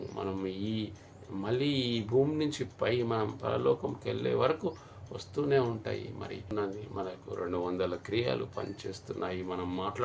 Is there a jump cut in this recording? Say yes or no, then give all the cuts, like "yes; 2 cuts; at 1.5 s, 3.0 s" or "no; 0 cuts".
yes; 1 cut; at 6.5 s